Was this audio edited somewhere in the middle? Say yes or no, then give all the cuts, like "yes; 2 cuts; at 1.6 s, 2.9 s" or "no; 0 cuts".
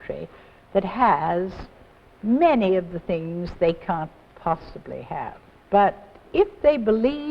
yes; 1 cut; at 5.5 s